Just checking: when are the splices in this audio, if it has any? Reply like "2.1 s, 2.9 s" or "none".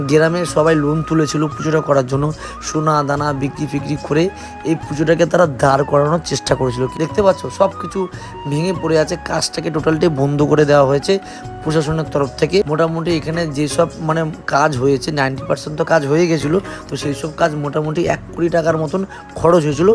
6.9 s, 12.7 s